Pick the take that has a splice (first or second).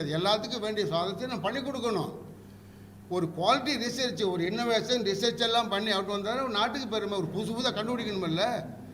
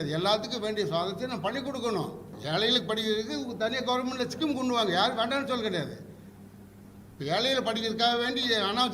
second